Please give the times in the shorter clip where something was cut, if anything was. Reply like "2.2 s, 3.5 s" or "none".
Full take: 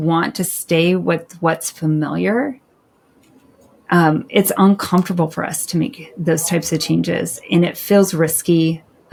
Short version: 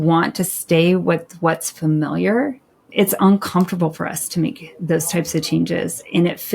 2.9 s